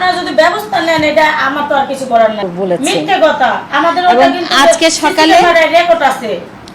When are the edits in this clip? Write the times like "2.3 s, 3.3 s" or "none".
2.4 s

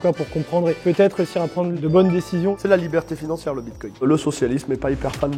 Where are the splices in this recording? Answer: 2.5 s

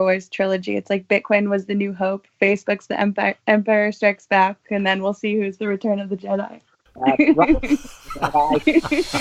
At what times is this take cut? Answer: none

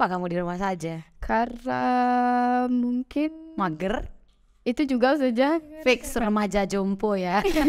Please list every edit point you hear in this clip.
none

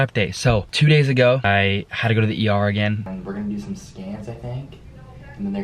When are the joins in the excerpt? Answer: 3.1 s

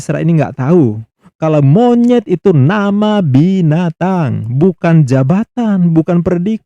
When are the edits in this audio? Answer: none

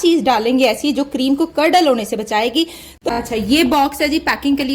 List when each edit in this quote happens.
2.9 s

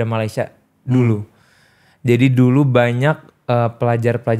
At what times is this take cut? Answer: none

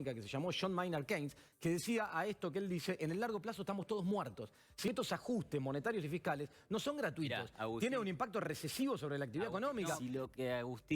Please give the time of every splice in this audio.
4.9 s, 10.0 s

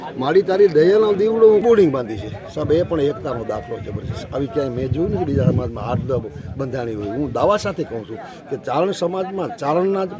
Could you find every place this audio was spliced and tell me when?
1.6 s

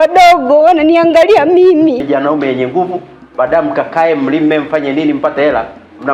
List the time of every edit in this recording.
2.0 s

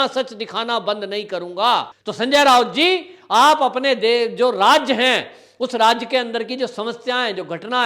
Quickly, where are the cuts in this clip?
2.0 s

